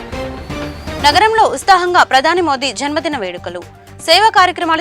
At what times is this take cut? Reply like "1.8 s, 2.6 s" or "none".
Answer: 1.0 s